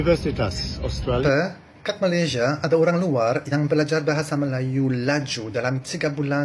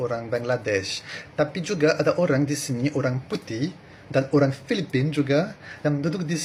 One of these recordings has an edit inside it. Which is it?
first; 1 cut; at 1.2 s

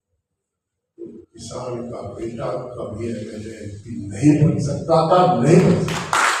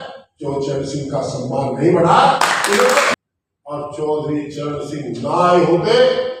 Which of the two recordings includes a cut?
second; 1 cut; at 3.2 s

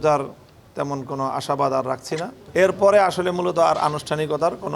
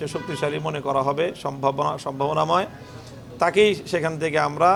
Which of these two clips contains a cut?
first; 1 cut; at 2.4 s

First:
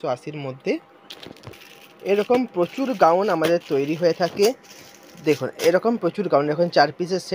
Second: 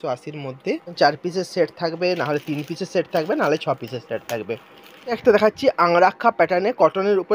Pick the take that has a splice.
second; 2 cuts; at 0.9 s, 5.2 s

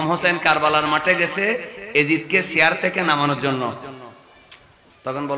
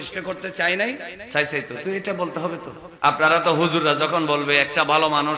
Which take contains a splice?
second; 2 cuts; at 1.1 s, 2.8 s

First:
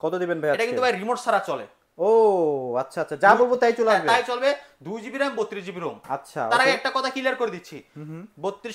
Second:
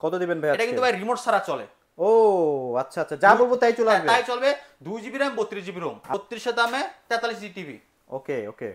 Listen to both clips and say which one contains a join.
second; 1 cut; at 6.1 s

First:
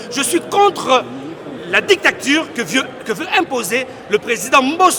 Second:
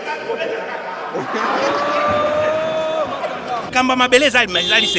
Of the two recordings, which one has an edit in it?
second; 1 cut; at 3.7 s

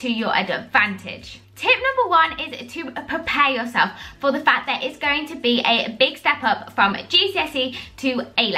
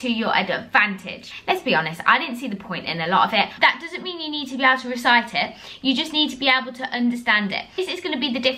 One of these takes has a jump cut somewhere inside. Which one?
second; 3 cuts; at 1.3 s, 3.5 s, 7.7 s

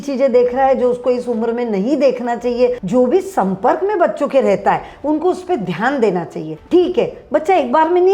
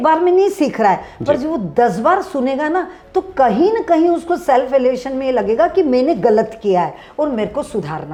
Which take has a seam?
first; 2 cuts; at 2.8 s, 6.5 s

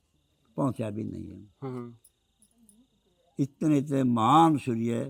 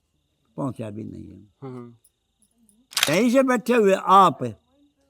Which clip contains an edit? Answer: second; 1 cut; at 3.1 s

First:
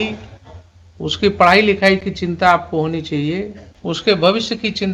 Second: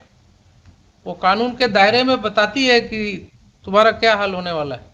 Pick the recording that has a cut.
first; 1 cut; at 3.7 s

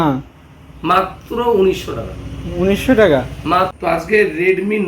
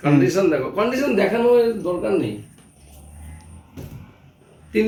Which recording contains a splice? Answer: first; 1 cut; at 3.7 s

